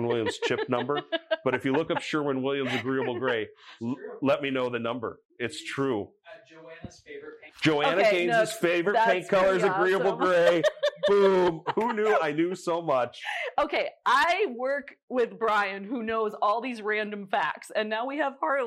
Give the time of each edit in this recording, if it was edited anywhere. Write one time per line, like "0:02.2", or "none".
none